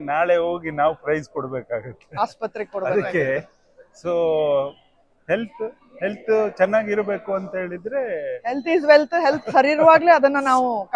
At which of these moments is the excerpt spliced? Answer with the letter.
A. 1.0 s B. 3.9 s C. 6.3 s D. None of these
D